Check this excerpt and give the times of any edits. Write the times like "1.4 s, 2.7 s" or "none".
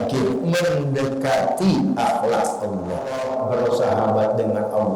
3.2 s